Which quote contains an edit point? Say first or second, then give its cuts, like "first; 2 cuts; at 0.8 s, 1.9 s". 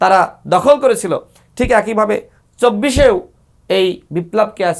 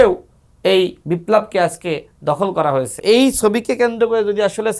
second; 1 cut; at 3.0 s